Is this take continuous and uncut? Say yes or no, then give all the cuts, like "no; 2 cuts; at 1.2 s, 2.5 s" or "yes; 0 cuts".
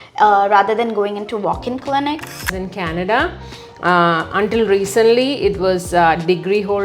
no; 1 cut; at 2.5 s